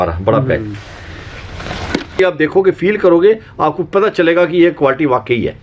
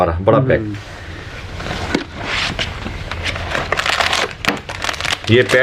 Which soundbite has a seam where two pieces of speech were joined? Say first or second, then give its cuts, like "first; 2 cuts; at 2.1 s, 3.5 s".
first; 1 cut; at 2.2 s